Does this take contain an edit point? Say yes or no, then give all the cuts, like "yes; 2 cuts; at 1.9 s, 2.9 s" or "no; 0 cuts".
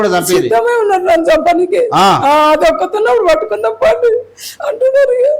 no; 0 cuts